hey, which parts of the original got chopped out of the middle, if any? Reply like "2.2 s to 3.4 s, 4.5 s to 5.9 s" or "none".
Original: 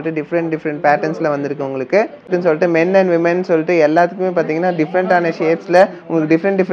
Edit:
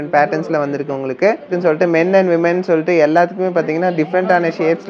2.1 s to 2.2 s